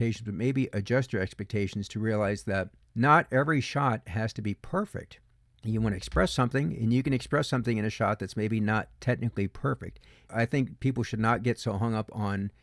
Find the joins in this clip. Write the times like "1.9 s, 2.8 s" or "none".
2.8 s, 10.3 s